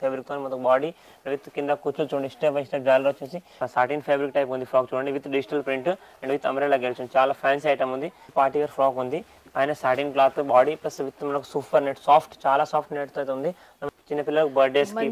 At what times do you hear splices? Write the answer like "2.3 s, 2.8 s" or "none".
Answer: 3.6 s, 8.2 s, 13.9 s